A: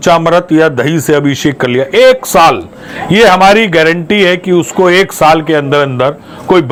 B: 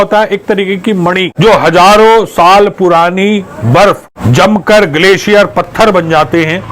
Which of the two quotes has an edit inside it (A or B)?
B